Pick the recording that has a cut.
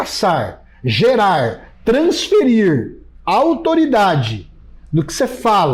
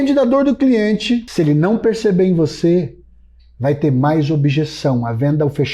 second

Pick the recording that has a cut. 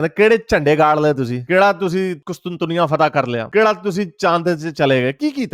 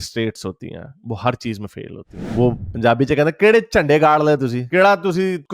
second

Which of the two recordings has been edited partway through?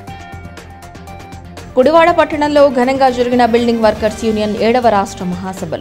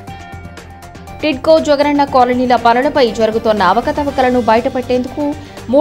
first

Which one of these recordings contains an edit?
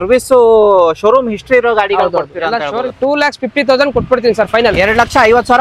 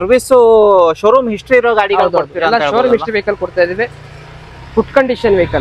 first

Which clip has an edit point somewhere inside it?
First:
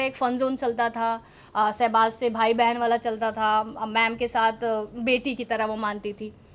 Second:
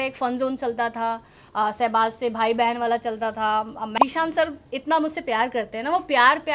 second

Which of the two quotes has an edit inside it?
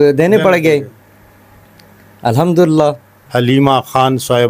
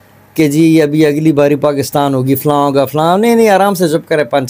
first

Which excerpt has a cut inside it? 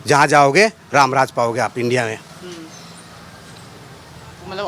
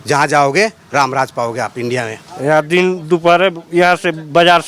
second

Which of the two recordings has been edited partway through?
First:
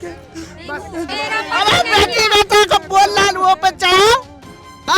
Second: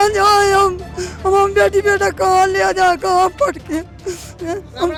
first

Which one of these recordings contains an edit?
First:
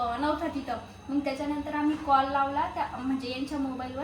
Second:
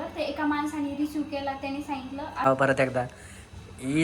second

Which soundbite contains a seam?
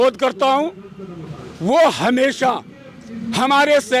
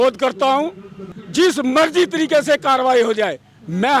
second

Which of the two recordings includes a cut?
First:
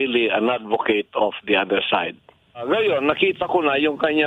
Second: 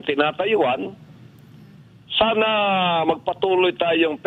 first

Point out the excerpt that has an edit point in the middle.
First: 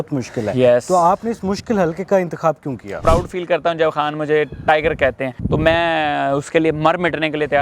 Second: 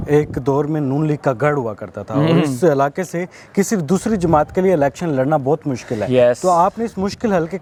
first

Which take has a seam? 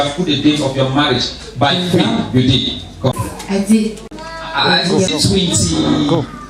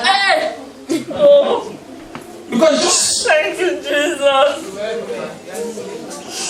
first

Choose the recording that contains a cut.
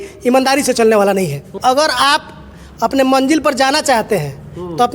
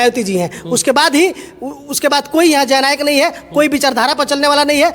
first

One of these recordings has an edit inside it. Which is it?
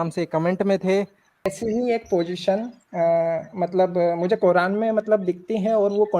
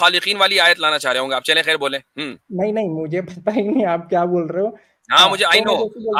first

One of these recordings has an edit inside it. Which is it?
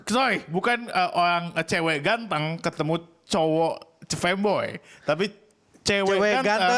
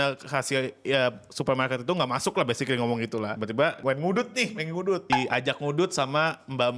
second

